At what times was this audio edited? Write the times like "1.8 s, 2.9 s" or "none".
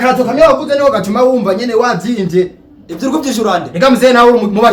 none

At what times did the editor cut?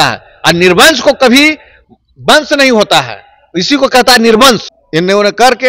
4.8 s

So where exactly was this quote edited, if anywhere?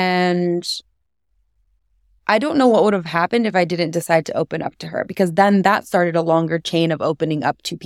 2.1 s

